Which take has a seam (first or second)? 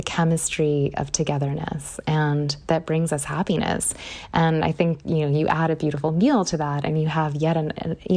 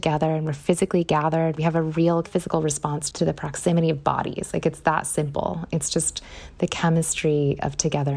second